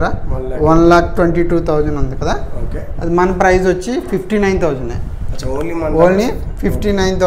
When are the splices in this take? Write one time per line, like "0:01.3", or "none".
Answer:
none